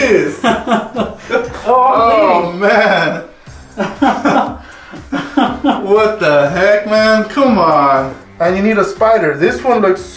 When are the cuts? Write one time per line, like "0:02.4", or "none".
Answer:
0:08.2